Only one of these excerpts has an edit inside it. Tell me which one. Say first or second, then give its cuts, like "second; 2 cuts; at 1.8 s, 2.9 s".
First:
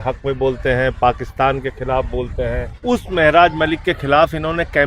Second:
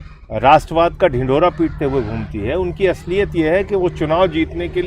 first; 1 cut; at 2.7 s